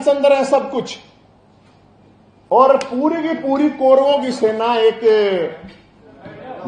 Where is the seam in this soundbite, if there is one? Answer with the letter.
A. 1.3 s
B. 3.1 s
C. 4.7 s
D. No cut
D